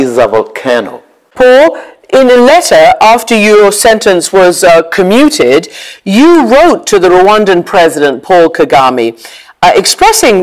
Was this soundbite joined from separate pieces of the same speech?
yes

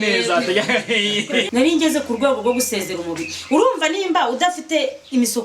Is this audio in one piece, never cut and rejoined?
no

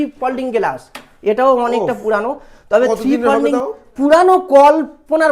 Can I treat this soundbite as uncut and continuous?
no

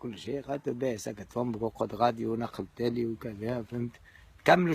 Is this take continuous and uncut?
no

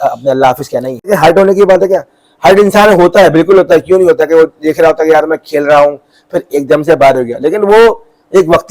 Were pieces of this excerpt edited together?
yes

